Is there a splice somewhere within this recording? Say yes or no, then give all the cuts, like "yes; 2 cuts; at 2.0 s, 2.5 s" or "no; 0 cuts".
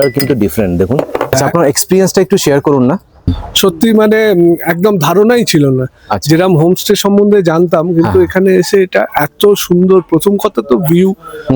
yes; 2 cuts; at 1.2 s, 3.3 s